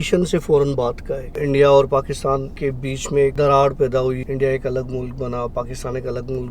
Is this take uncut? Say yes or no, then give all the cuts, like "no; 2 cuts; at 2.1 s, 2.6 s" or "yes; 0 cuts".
no; 3 cuts; at 1.4 s, 2.8 s, 4.2 s